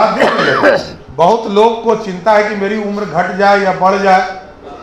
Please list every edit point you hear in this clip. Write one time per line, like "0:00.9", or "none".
0:01.0